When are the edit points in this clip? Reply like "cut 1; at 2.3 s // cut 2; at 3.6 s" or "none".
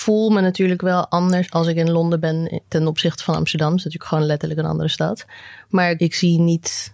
cut 1; at 1.5 s // cut 2; at 6.0 s